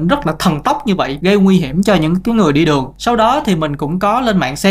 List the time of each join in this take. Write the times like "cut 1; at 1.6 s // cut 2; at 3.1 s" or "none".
none